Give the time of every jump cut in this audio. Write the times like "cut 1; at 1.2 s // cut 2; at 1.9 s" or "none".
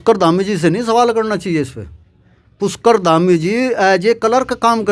none